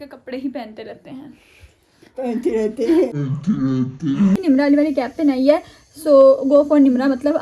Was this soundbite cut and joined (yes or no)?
yes